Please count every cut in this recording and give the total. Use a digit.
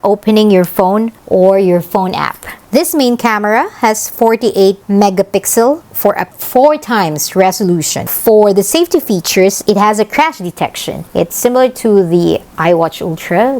2